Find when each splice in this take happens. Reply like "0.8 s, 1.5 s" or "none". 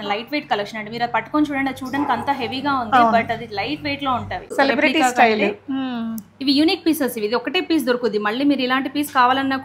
4.5 s

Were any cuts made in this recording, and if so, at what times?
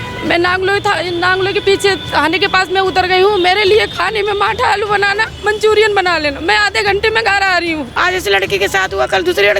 7.9 s

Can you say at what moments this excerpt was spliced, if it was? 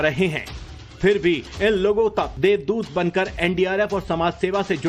2.6 s

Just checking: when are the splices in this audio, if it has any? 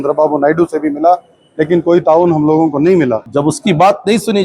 3.2 s

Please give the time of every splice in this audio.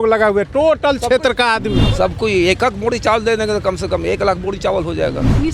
1.8 s

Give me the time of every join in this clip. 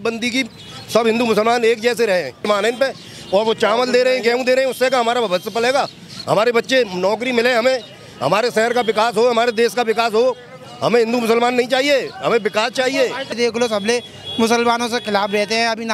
2.5 s, 13.4 s

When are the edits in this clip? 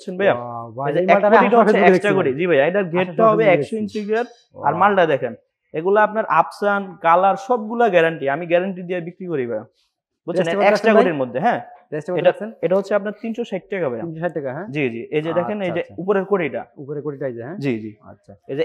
none

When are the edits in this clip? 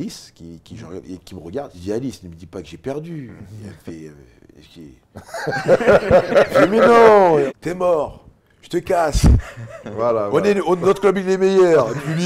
1.7 s, 7.4 s

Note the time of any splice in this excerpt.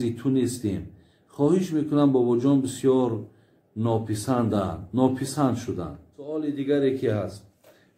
6.3 s

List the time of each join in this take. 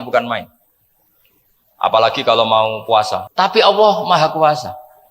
3.2 s

